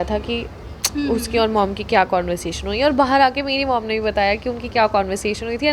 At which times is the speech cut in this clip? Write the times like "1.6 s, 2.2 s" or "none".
none